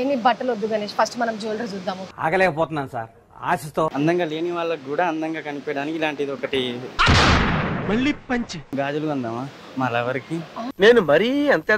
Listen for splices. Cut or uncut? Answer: cut